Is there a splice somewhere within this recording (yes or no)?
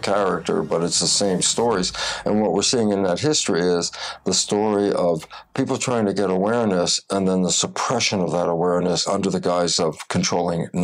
yes